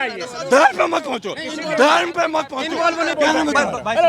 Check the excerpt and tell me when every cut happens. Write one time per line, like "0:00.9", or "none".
0:03.2